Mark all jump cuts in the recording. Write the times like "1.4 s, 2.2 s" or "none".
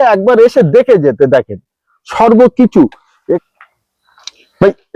3.4 s

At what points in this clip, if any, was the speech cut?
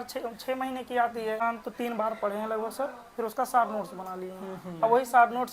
1.4 s

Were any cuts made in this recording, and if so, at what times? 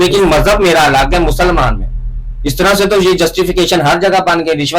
none

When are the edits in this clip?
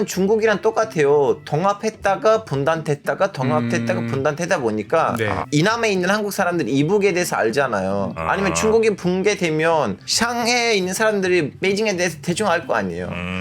5.4 s, 8.2 s

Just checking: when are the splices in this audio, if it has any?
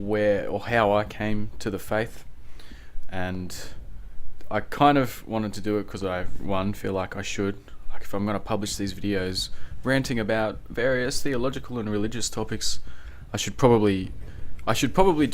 10.0 s

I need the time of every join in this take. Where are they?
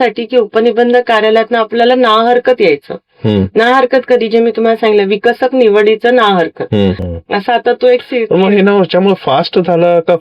7.1 s

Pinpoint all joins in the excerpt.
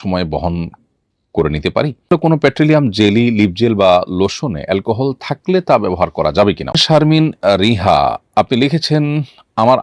2.0 s, 6.7 s

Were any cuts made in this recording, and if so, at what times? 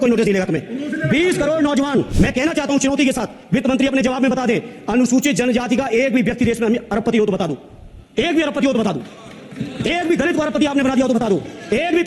2.1 s

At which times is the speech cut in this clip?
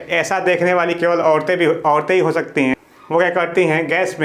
3.0 s

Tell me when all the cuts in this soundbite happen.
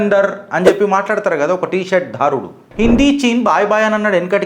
2.9 s

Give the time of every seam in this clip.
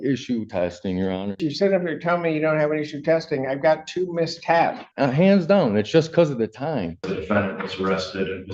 1.4 s, 4.9 s, 7.2 s

